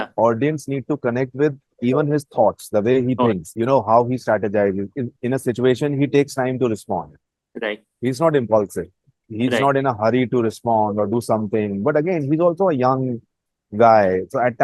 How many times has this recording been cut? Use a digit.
0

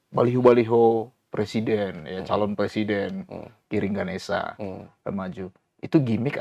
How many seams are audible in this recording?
0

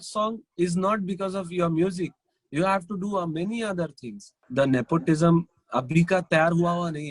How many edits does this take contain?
1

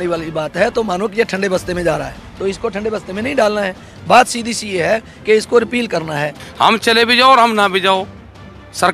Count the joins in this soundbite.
1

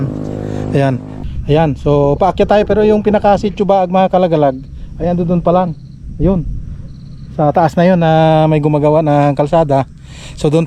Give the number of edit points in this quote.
1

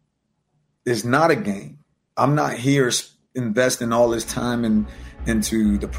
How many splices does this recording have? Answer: 0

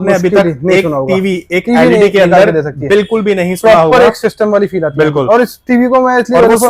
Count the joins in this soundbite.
0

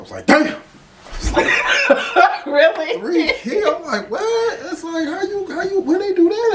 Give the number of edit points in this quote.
0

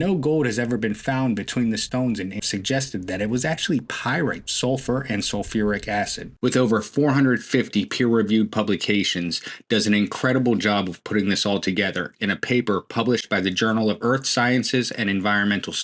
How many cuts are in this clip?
3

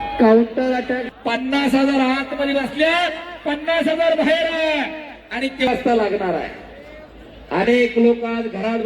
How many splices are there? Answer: 2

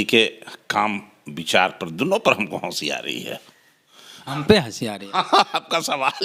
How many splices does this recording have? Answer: 0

